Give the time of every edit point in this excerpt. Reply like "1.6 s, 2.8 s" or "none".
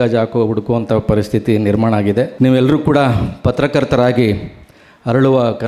2.3 s